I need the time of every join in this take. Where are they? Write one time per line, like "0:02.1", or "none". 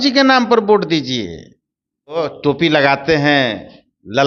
0:02.2